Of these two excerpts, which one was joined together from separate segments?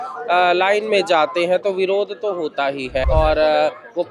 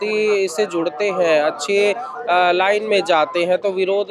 first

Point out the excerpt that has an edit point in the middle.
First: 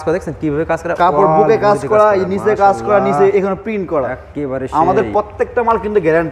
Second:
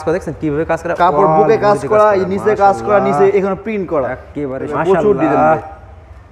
second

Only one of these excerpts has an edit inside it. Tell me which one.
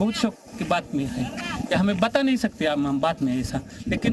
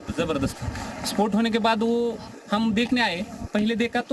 second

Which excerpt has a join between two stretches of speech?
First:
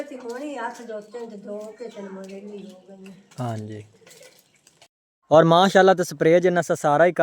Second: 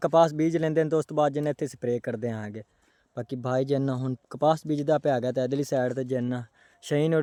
first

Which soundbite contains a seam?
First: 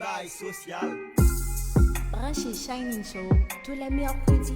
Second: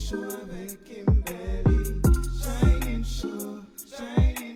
first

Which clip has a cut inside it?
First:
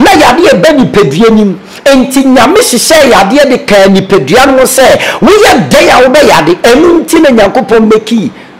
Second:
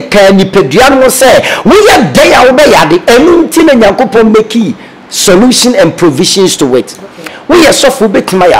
second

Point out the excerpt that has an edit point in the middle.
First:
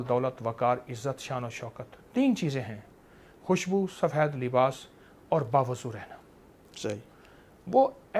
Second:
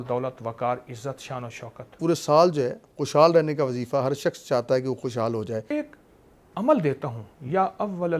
second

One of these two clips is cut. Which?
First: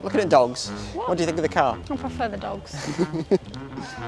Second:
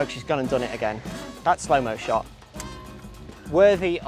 first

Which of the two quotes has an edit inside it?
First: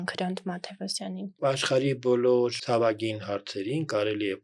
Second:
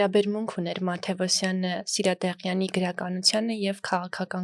first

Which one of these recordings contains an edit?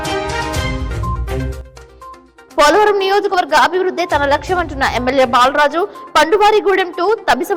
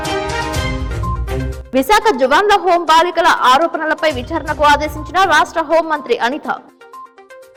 first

